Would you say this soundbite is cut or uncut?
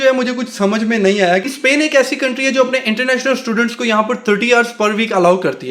cut